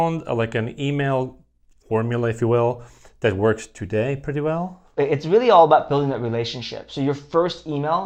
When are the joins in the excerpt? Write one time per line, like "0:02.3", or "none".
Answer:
none